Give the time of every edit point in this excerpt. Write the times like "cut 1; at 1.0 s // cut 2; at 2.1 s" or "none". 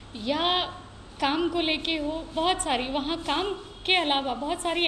none